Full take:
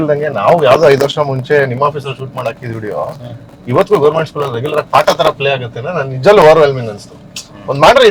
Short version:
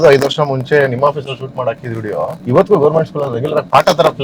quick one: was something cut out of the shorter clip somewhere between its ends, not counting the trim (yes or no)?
yes